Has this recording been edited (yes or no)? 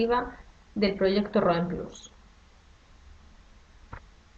no